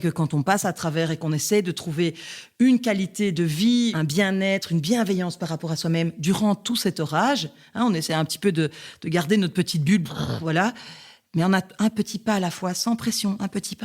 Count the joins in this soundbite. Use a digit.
1